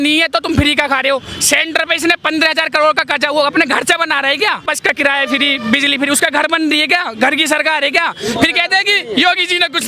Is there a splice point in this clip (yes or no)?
yes